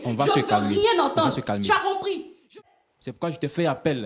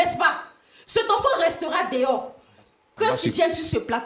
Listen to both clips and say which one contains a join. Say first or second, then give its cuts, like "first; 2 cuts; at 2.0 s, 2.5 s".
first; 1 cut; at 2.3 s